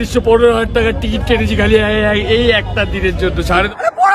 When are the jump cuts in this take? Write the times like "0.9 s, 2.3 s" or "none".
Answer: 3.3 s